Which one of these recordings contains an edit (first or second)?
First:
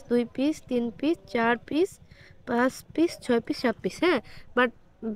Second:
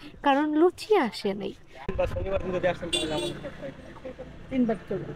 second